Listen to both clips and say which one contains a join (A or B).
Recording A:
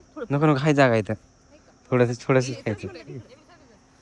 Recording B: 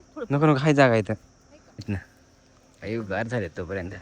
B